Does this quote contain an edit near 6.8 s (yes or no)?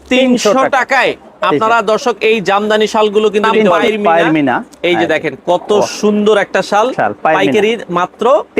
no